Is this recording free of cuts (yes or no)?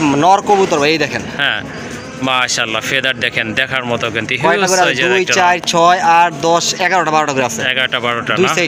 yes